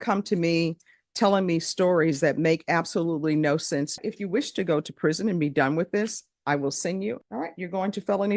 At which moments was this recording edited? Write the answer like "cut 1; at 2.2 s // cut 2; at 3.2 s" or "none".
cut 1; at 4.0 s // cut 2; at 7.2 s